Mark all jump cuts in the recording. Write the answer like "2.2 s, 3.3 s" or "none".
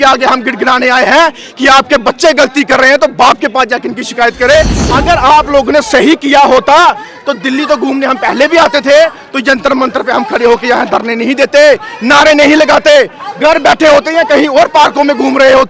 4.8 s